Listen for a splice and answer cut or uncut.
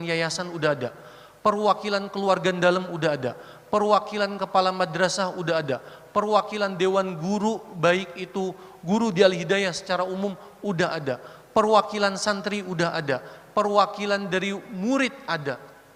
uncut